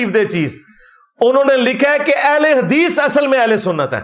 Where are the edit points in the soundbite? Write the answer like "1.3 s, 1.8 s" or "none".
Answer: none

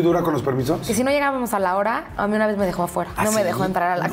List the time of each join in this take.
0.9 s, 3.1 s

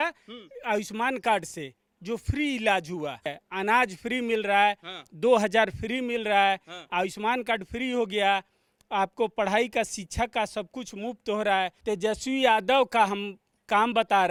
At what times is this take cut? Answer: none

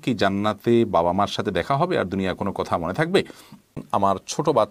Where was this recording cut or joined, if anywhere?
3.8 s

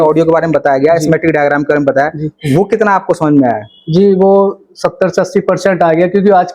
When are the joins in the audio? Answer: none

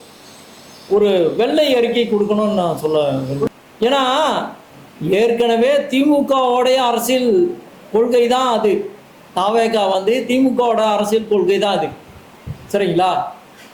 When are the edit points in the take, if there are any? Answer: 3.5 s

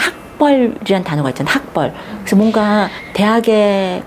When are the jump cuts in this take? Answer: none

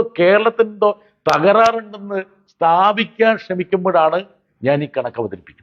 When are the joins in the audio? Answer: none

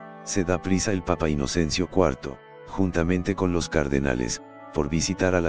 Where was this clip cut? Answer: 1.4 s

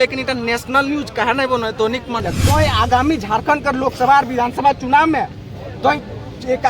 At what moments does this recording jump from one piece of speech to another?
2.3 s

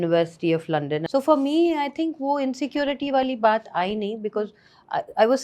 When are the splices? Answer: 1.0 s

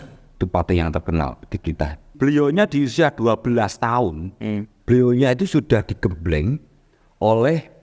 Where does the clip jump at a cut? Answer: 2.1 s

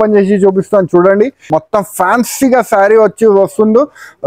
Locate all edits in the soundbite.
1.5 s

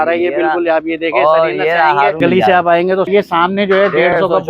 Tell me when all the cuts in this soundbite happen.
2.2 s, 3.1 s

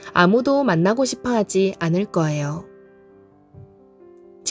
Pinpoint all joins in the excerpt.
none

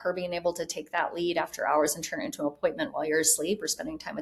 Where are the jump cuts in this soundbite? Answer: none

